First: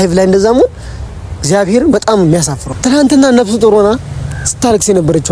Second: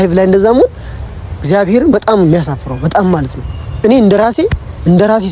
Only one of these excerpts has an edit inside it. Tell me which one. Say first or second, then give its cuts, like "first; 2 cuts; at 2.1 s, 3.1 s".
first; 1 cut; at 2.6 s